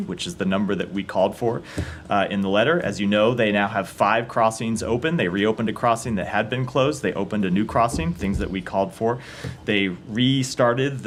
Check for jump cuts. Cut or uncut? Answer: uncut